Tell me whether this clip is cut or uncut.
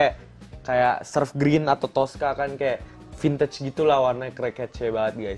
uncut